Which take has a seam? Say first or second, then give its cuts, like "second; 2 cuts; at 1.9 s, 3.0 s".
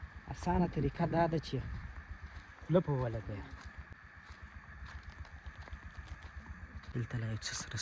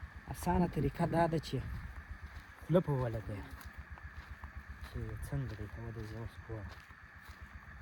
first; 2 cuts; at 3.9 s, 6.8 s